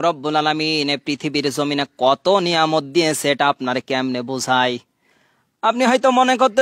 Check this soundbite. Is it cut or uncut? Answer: uncut